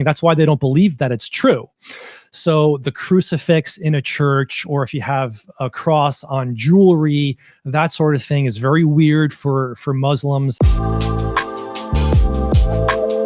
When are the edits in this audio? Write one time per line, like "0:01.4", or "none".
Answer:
0:10.5